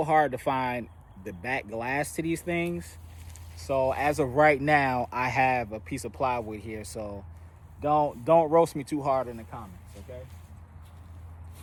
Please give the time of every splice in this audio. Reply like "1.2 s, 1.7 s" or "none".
none

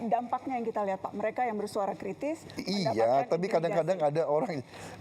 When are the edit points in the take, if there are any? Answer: none

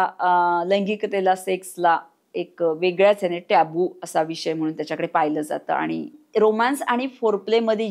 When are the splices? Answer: 6.2 s

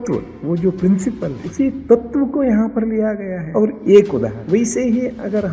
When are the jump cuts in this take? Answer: 1.4 s, 3.4 s, 4.4 s

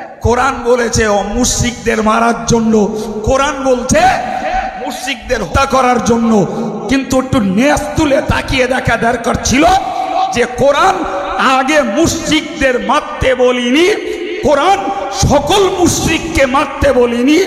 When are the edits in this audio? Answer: 5.5 s

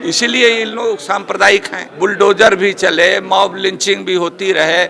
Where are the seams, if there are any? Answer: 1.8 s

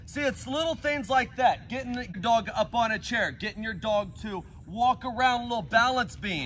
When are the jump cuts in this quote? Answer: 2.1 s

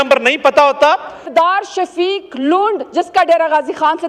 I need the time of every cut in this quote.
1.3 s

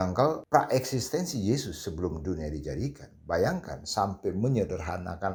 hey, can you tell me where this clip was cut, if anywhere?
none

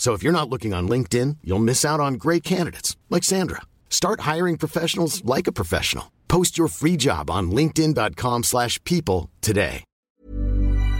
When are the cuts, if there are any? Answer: 10.1 s

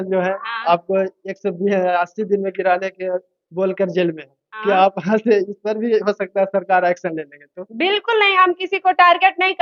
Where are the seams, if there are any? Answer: none

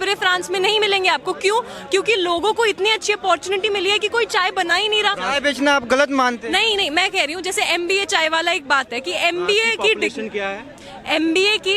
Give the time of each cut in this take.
none

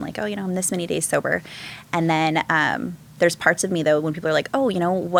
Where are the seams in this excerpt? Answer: none

